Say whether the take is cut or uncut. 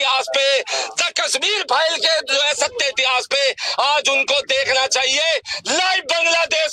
uncut